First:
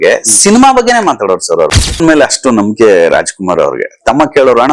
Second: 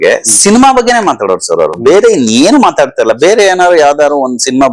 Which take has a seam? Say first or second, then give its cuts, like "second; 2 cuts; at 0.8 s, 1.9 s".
first; 1 cut; at 1.8 s